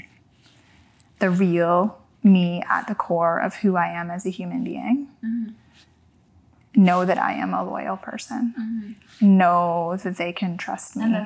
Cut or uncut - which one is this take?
uncut